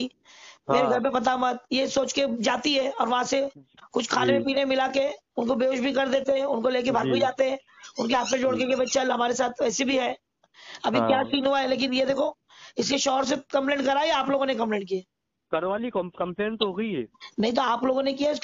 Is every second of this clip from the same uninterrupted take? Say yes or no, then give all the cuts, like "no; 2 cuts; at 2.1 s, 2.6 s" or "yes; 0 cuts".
yes; 0 cuts